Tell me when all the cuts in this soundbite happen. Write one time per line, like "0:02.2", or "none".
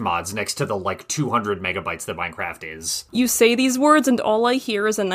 0:03.0